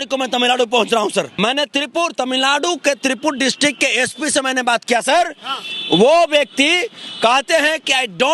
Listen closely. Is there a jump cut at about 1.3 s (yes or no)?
yes